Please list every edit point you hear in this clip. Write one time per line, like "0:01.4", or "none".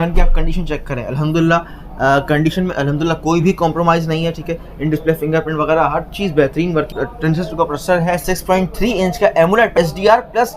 0:06.9
0:08.2
0:09.7

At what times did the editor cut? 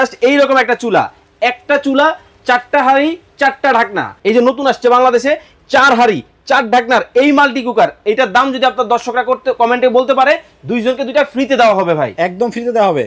0:04.1

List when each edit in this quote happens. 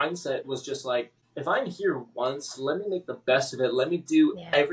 0:01.2

